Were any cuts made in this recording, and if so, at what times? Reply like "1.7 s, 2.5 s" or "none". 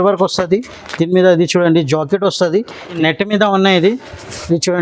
3.0 s